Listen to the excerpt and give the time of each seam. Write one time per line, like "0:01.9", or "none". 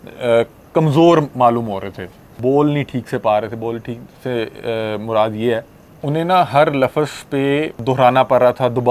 0:02.3
0:06.0
0:07.7